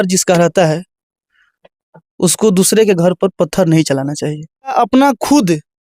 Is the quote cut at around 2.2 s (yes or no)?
no